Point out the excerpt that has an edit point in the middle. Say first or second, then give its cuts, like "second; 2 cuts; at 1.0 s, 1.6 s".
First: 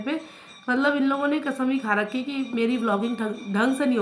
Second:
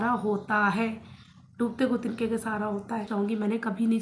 second; 1 cut; at 3.1 s